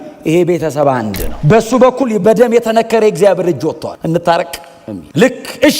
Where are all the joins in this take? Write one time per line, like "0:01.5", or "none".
0:01.3
0:03.9